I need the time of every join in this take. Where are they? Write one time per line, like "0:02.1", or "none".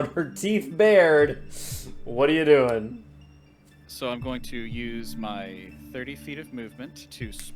none